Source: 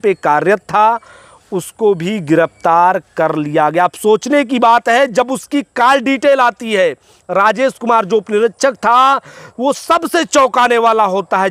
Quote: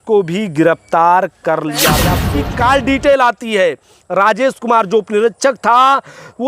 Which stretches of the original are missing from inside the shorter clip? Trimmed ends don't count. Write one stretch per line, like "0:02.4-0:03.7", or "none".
0:03.9-0:05.4